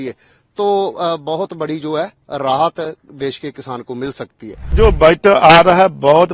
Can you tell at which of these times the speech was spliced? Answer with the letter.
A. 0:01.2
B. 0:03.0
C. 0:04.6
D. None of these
C